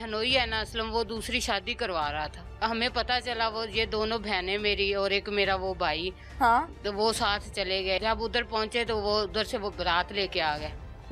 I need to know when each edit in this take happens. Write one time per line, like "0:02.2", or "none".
0:02.6
0:08.0